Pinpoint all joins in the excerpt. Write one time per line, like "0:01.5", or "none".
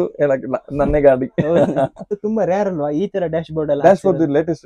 0:02.2